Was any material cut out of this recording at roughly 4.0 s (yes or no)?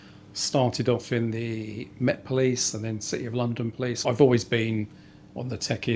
yes